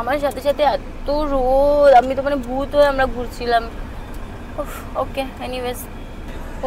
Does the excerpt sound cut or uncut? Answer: uncut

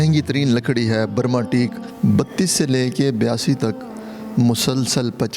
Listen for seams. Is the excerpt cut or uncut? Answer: cut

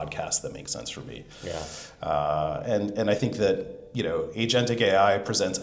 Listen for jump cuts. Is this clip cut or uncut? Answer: uncut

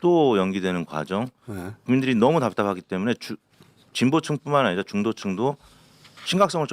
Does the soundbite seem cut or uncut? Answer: uncut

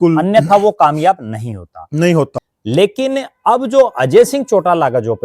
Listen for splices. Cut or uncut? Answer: cut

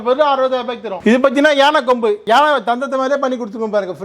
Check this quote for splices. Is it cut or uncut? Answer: cut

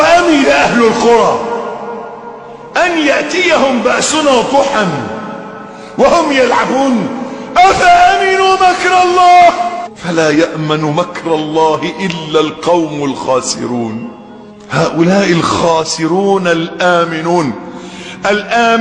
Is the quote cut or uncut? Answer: uncut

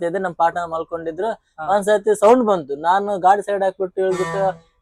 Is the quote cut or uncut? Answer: uncut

